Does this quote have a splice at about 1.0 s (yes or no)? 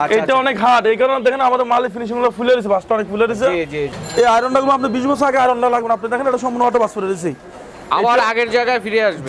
no